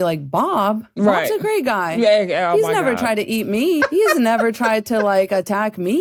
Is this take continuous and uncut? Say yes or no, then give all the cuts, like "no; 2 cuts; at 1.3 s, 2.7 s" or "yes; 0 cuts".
yes; 0 cuts